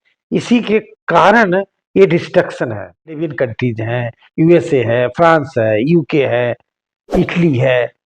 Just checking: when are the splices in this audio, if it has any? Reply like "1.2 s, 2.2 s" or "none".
3.1 s